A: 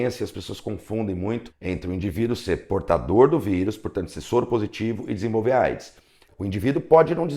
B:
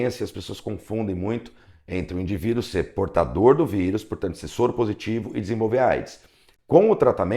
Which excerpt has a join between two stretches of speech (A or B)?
A